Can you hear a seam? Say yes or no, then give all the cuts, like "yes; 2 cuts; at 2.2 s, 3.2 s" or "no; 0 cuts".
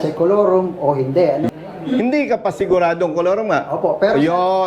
yes; 1 cut; at 1.5 s